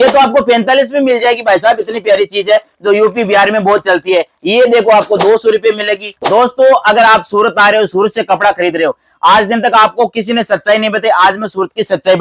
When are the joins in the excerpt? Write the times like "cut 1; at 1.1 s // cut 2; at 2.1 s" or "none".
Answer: cut 1; at 6.1 s